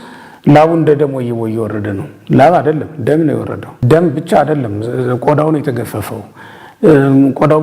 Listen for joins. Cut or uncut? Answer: cut